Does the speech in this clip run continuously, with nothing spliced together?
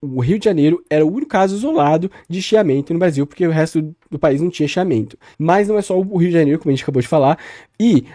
no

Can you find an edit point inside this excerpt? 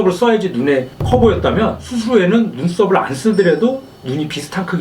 no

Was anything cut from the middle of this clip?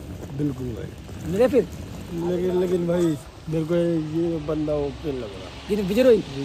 no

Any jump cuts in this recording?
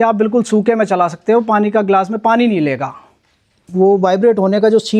yes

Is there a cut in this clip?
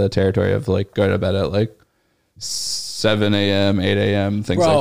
no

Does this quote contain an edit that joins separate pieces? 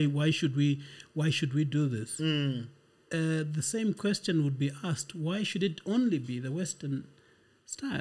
no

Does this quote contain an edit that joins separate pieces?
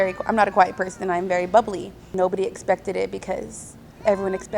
yes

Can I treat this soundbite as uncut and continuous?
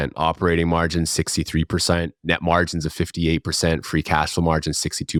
yes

